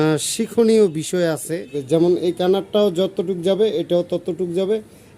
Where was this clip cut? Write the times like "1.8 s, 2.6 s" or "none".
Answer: 1.7 s